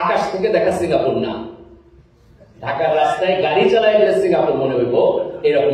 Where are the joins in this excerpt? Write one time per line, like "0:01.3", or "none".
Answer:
none

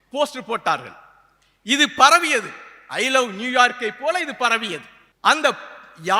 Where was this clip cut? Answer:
none

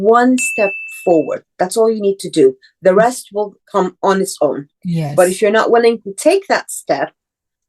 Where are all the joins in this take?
0:03.7
0:04.7

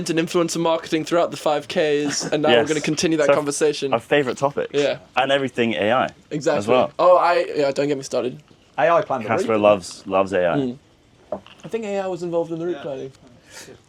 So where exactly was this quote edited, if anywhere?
none

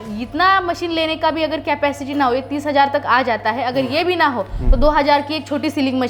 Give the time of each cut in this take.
none

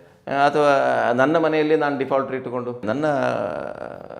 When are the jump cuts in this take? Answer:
0:02.8

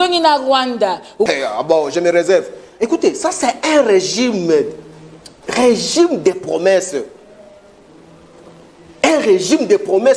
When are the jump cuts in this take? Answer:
0:01.3

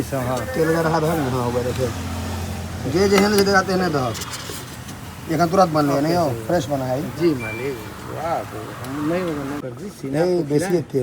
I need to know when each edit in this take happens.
0:09.6

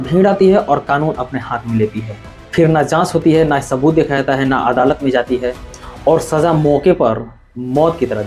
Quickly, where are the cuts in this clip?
none

